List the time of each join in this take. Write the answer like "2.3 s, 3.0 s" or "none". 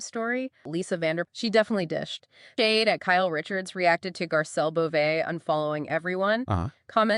1.1 s, 2.5 s